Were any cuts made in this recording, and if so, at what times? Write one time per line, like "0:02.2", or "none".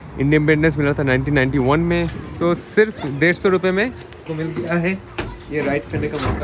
0:02.2
0:04.3